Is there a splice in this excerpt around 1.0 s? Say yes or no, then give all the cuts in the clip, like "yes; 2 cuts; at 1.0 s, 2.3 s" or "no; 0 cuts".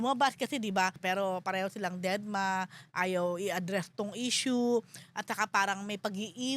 yes; 1 cut; at 1.0 s